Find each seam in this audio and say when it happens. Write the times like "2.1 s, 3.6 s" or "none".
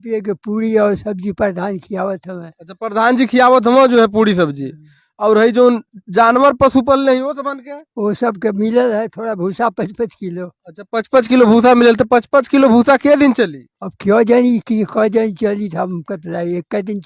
none